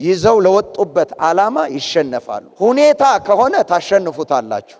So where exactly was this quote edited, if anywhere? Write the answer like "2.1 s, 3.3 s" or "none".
none